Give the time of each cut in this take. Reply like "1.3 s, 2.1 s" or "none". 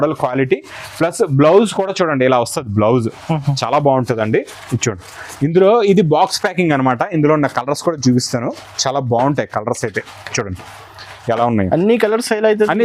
none